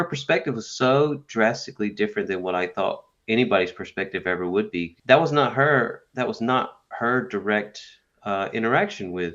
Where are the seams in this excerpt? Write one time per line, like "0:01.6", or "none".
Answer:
0:05.0

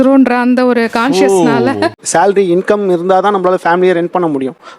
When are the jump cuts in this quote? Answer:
0:01.6

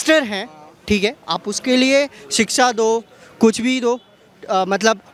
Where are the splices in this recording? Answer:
none

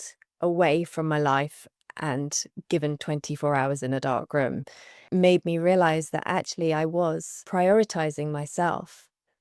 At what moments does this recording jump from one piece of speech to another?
none

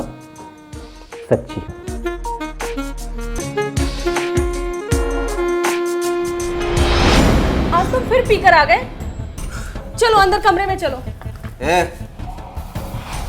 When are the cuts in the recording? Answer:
0:03.4
0:07.2

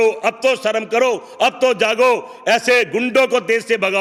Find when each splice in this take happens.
none

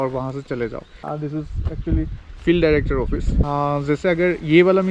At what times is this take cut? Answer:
0:00.9
0:03.4

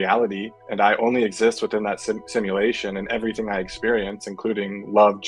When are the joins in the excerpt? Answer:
none

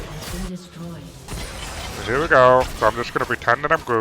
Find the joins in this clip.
0:01.3

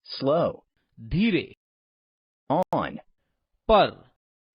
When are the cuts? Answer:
none

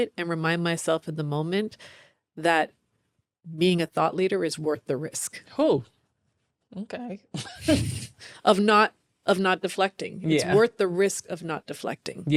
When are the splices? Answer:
none

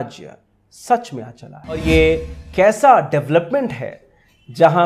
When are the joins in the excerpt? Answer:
0:01.8

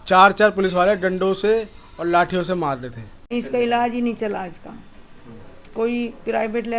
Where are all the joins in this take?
0:03.3

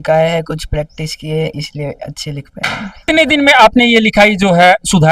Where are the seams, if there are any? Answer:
0:03.1

